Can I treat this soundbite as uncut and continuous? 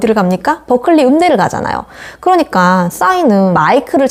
yes; 0 cuts

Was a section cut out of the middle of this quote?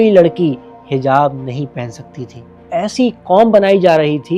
yes; 1 cut; at 2.7 s

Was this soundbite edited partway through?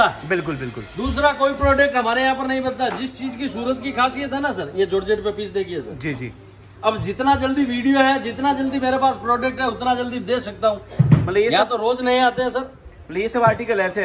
no; 0 cuts

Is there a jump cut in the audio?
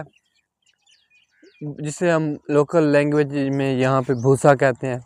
no; 0 cuts

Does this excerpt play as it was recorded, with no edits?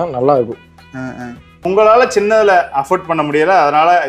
no; 1 cut; at 1.7 s

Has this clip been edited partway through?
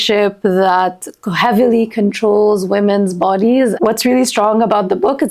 yes; 1 cut; at 3.8 s

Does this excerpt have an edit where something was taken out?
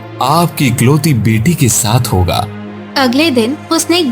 yes; 1 cut; at 2.5 s

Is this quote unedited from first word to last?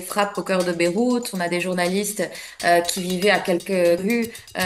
yes; 0 cuts

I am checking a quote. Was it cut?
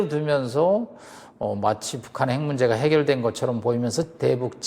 no; 0 cuts

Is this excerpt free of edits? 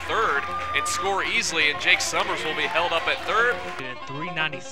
no; 1 cut; at 3.8 s

